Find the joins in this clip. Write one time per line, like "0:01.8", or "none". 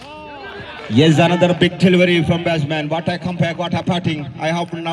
none